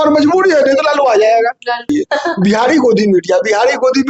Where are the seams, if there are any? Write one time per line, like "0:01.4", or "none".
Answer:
0:01.9